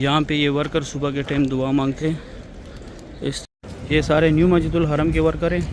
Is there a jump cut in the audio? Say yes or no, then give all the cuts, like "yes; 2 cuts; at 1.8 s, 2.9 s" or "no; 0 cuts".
yes; 1 cut; at 3.4 s